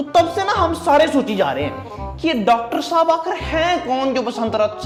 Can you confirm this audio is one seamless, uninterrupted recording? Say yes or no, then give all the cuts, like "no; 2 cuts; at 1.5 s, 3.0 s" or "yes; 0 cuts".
yes; 0 cuts